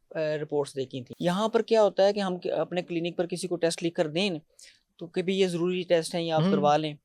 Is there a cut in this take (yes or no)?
yes